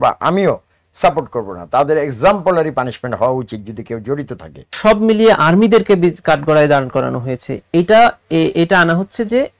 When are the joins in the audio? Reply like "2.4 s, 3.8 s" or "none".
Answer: 4.7 s